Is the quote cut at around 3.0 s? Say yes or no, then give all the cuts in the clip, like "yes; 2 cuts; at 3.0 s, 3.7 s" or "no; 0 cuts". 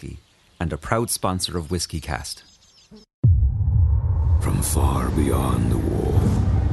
yes; 1 cut; at 3.0 s